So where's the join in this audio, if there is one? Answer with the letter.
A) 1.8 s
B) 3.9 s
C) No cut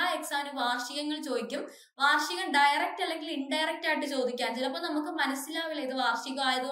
C